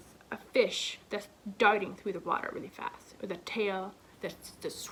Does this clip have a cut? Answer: no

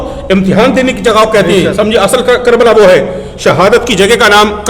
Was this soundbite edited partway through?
no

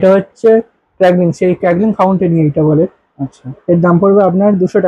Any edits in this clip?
no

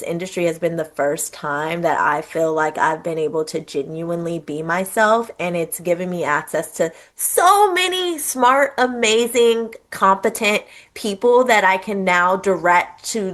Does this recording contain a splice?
no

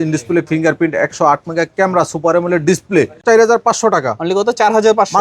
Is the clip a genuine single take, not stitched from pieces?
no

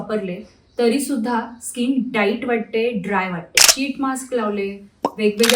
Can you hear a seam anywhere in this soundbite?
yes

